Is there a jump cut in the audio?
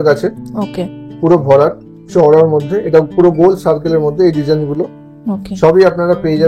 no; 0 cuts

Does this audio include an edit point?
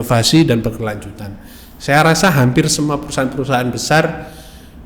no; 0 cuts

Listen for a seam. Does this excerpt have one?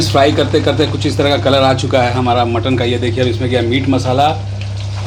no; 0 cuts

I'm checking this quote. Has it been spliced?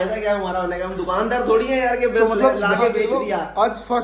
no; 0 cuts

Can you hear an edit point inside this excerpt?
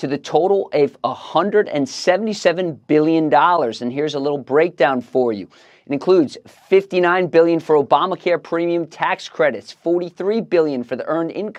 no; 0 cuts

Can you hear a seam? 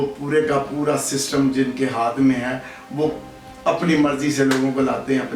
no; 0 cuts

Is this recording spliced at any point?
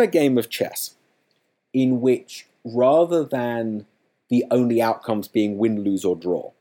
no; 0 cuts

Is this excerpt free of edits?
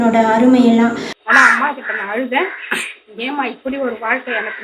no; 1 cut; at 1.1 s

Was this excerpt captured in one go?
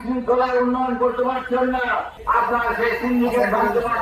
no; 1 cut; at 2.1 s

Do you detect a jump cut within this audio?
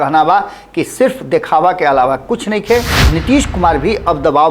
yes; 1 cut; at 3.0 s

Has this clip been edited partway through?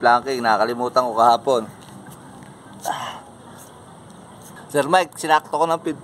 yes; 1 cut; at 4.4 s

